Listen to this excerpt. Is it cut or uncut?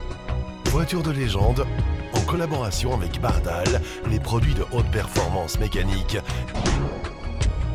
uncut